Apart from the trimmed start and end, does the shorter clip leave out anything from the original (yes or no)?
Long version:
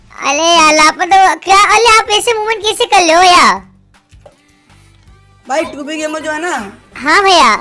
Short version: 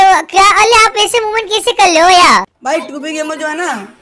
yes